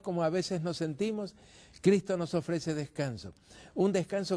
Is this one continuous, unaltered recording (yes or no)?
no